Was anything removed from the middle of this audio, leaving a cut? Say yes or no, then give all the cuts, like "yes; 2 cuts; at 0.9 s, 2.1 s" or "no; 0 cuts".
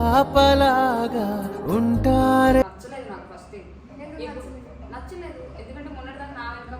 yes; 1 cut; at 2.6 s